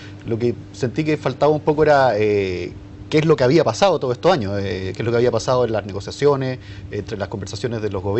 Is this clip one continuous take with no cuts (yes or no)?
no